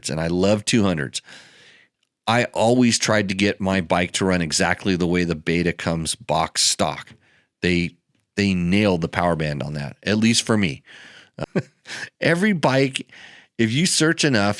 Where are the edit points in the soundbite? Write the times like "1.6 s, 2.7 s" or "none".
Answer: 11.4 s